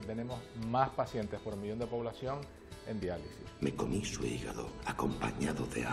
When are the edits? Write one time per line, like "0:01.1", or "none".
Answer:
0:03.4